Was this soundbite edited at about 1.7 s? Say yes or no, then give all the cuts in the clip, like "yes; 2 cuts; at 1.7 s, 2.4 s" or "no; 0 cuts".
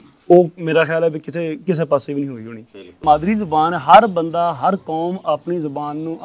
no; 1 cut; at 2.9 s